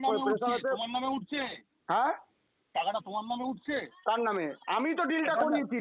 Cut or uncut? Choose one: uncut